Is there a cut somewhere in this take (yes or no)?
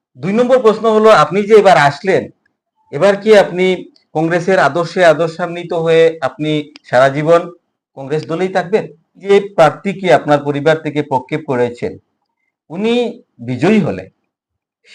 yes